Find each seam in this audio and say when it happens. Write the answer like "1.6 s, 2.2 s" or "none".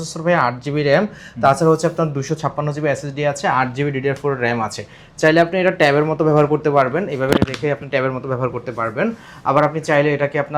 none